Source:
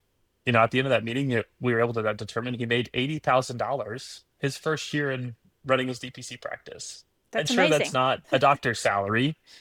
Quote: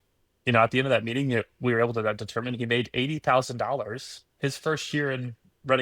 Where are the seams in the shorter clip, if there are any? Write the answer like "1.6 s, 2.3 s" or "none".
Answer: none